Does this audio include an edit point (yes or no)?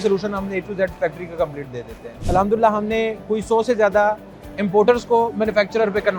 no